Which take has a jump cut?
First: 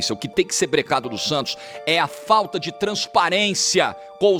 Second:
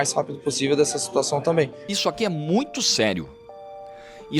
second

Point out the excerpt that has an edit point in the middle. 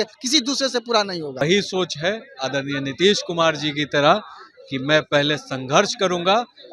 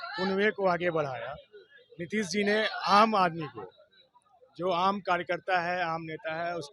first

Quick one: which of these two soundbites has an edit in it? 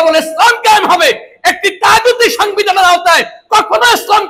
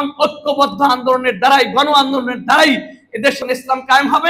second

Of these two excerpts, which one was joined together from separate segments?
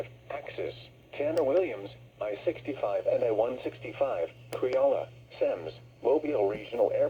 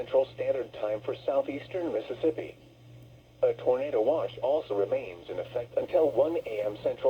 second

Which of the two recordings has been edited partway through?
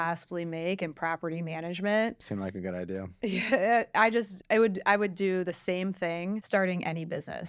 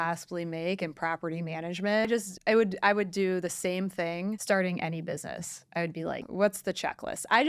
second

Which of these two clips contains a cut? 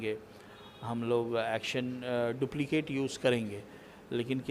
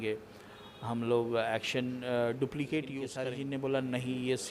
second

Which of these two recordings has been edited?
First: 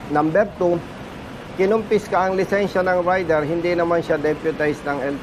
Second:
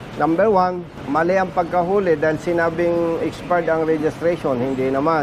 second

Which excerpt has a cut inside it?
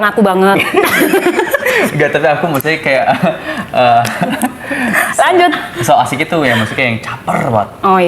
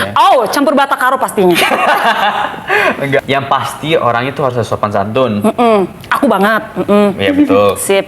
second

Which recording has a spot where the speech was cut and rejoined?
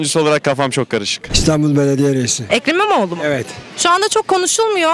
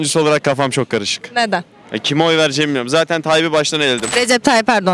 first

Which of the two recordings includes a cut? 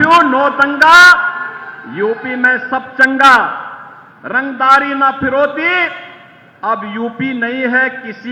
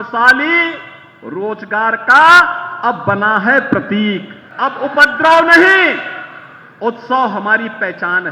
second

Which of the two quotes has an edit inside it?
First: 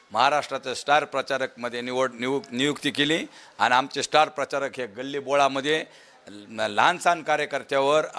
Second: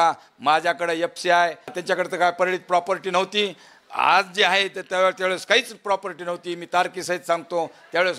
second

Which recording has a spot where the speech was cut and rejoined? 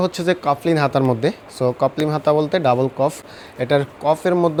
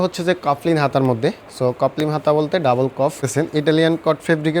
second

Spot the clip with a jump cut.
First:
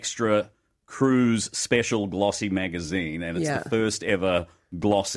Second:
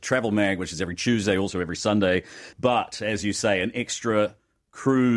second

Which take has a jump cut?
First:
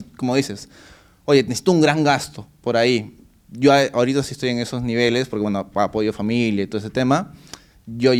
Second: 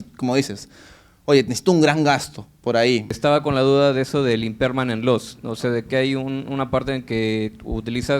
second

